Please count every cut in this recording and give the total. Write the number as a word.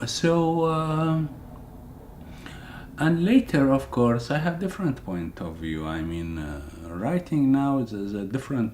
one